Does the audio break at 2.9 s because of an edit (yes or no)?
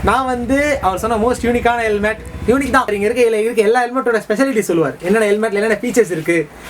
yes